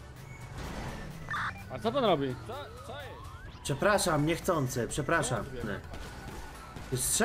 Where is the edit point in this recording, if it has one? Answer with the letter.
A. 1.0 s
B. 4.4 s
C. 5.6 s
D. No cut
C